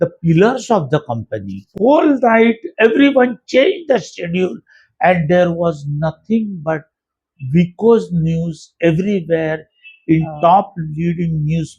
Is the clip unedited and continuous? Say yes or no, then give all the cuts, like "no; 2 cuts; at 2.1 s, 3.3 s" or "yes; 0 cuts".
no; 1 cut; at 1.7 s